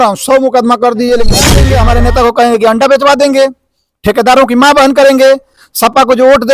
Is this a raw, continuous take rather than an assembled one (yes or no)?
no